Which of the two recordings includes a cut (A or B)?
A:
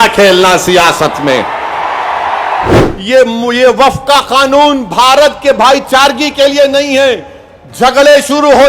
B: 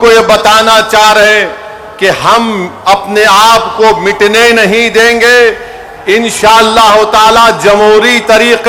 A